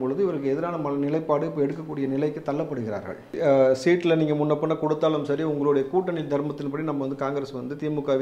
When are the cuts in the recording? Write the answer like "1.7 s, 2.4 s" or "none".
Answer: 3.4 s